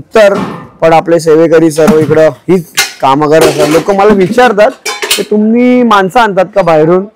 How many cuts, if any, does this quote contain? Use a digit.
0